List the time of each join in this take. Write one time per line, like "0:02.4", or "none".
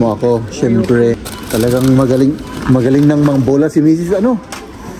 0:01.2